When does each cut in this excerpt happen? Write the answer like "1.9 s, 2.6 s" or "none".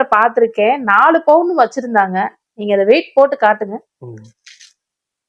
none